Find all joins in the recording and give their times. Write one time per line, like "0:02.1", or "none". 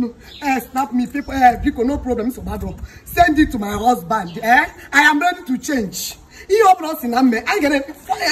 none